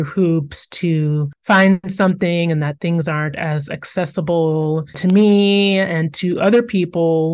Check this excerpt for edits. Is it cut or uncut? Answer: uncut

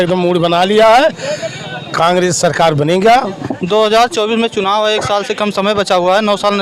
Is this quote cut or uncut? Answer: cut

